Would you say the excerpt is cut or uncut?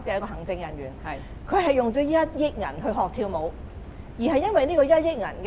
uncut